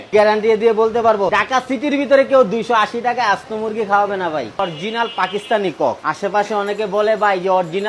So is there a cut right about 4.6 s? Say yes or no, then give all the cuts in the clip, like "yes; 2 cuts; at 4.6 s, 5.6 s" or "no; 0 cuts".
yes; 2 cuts; at 1.3 s, 4.6 s